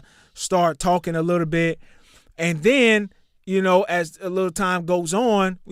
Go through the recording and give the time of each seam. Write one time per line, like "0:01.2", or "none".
none